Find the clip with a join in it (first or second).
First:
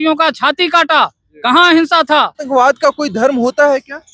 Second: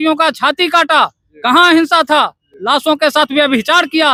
first